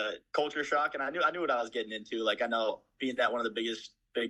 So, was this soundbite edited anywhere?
no; 0 cuts

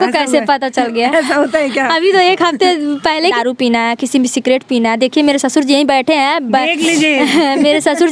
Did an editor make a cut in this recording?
yes; 1 cut; at 3.3 s

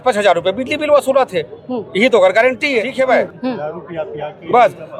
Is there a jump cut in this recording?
no; 0 cuts

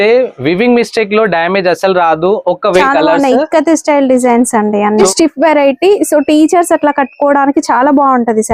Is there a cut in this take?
yes; 2 cuts; at 2.8 s, 5.1 s

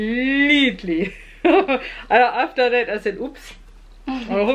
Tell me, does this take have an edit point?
no; 0 cuts

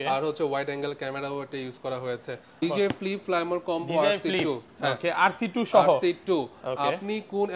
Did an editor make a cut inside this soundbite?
yes; 1 cut; at 2.6 s

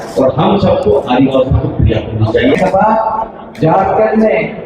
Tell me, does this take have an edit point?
yes; 1 cut; at 2.6 s

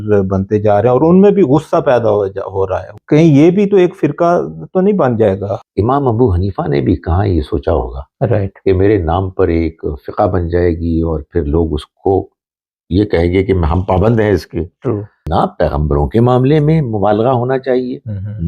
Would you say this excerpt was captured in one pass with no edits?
no; 3 cuts; at 2.9 s, 5.5 s, 15.2 s

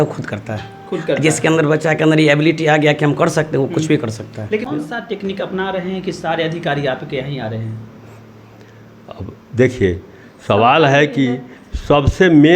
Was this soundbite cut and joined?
yes; 1 cut; at 4.7 s

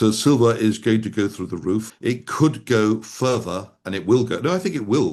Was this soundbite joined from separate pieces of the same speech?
no; 0 cuts

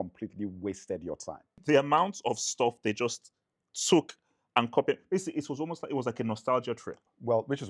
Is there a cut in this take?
yes; 1 cut; at 1.6 s

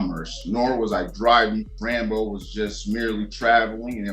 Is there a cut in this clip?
yes; 1 cut; at 1.8 s

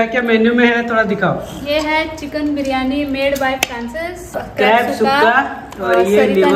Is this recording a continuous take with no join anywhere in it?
no; 1 cut; at 4.4 s

